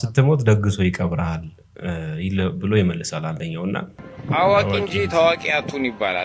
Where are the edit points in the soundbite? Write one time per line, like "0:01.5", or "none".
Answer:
0:03.9